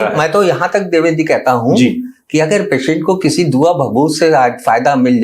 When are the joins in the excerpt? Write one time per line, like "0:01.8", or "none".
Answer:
none